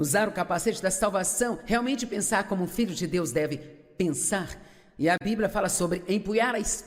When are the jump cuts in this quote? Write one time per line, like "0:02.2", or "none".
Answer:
none